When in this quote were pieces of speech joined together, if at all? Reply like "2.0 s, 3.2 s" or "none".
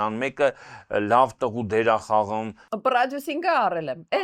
2.6 s